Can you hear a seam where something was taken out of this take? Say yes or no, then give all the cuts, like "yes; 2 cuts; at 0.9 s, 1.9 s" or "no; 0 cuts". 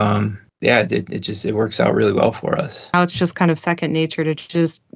yes; 1 cut; at 2.9 s